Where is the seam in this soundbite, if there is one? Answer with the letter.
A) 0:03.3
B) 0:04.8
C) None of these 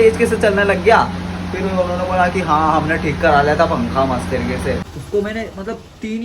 B